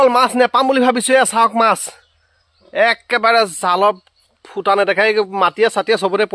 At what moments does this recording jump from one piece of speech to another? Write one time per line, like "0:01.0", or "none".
none